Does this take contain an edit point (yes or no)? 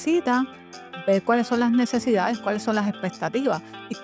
no